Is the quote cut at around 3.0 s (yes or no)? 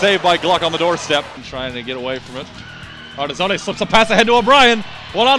no